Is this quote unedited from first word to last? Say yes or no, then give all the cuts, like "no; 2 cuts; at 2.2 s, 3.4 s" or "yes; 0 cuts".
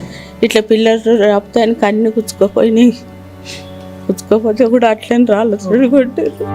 yes; 0 cuts